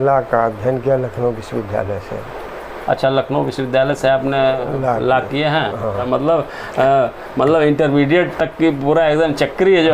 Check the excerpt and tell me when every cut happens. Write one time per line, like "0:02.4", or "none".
0:06.0